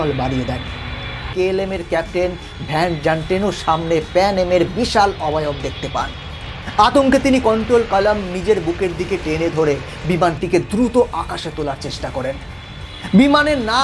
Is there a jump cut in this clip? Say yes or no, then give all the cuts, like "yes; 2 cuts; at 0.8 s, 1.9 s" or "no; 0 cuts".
yes; 1 cut; at 1.3 s